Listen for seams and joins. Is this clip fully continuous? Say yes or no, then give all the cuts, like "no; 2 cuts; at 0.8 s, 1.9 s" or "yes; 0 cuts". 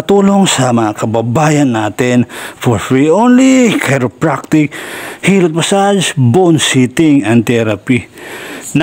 yes; 0 cuts